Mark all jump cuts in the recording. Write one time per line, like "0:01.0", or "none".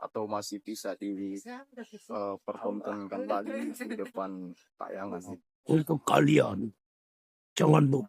0:05.5